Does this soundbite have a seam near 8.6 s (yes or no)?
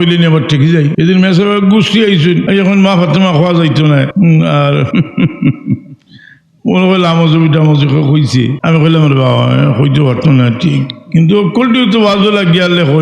yes